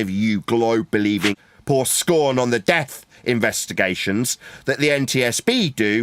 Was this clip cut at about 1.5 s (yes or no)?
yes